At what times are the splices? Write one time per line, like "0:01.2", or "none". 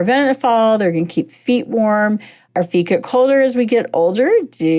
0:02.4